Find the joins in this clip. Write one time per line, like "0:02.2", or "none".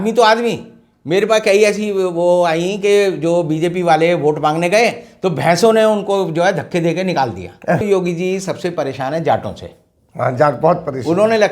0:07.8